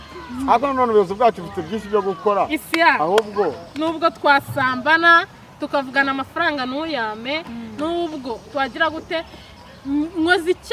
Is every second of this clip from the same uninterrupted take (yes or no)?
yes